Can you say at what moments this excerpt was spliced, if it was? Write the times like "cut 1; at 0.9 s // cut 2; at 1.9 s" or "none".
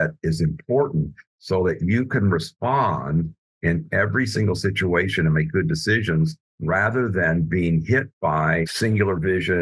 cut 1; at 8.7 s